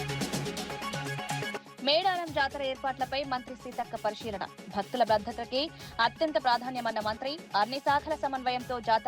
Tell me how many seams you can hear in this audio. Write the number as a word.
zero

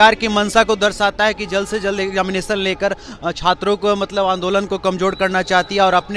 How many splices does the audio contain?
zero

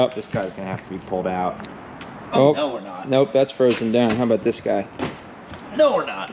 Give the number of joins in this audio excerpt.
one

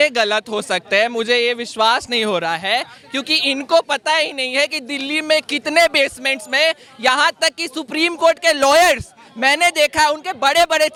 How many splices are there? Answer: zero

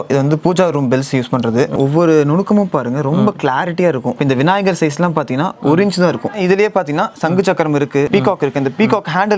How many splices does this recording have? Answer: four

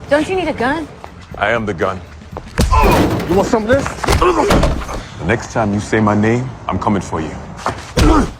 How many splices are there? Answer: zero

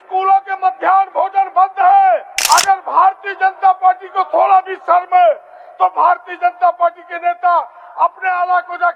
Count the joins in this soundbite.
one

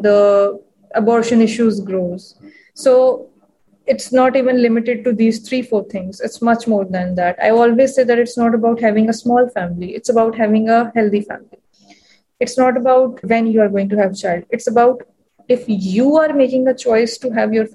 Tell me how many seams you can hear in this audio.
one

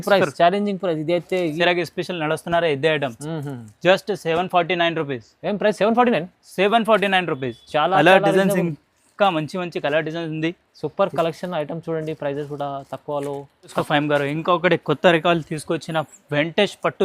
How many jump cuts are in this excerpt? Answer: two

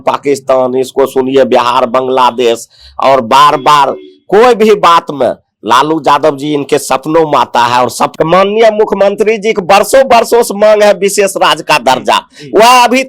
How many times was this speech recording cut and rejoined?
one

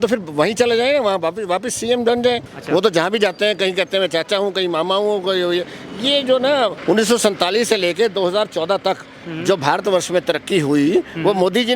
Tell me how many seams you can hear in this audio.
two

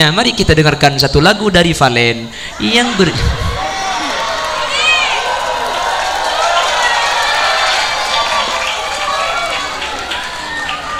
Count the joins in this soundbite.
zero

